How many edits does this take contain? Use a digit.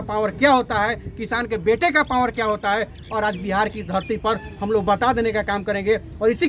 0